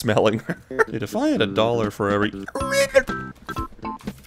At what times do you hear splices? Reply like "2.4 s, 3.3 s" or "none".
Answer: 1.0 s

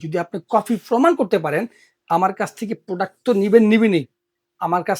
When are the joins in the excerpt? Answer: none

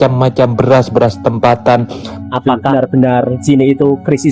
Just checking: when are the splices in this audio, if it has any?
2.2 s

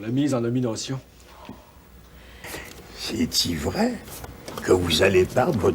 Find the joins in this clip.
2.4 s

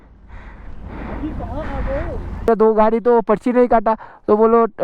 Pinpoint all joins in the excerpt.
2.5 s

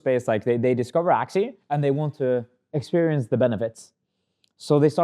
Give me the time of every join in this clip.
1.6 s

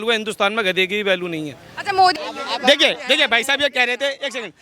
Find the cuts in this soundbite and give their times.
2.2 s

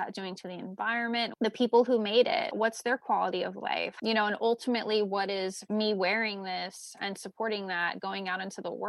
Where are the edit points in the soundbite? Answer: 1.3 s, 3.9 s

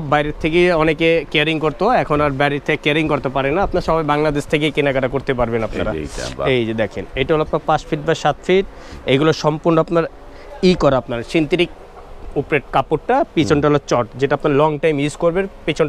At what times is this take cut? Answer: none

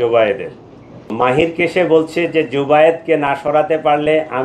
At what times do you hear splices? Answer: 1.1 s

